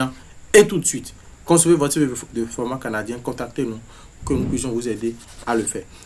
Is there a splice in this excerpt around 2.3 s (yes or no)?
yes